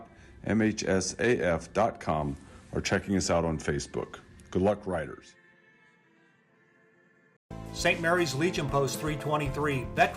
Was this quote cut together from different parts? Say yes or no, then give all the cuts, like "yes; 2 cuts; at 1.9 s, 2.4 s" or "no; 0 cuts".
yes; 1 cut; at 7.4 s